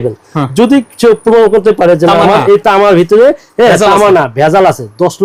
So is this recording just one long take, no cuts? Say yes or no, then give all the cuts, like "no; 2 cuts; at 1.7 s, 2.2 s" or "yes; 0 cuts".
yes; 0 cuts